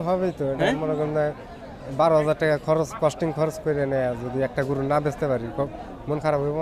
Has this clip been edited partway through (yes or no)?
no